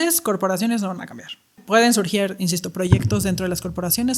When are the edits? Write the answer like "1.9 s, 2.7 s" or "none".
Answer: 1.6 s